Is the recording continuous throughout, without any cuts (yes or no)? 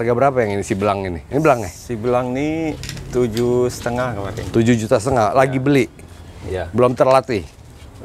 yes